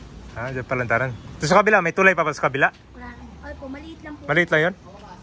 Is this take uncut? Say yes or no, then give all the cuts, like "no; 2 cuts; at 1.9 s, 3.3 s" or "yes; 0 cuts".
yes; 0 cuts